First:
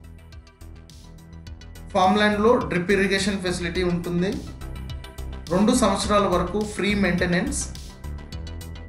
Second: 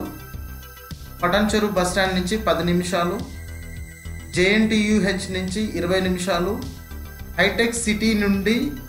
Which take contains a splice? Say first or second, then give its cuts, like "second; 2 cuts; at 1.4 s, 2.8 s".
first; 2 cuts; at 1.9 s, 7.6 s